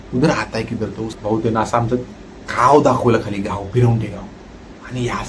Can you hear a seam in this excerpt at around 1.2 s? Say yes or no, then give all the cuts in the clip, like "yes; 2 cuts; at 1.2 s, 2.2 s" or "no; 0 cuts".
yes; 1 cut; at 1.2 s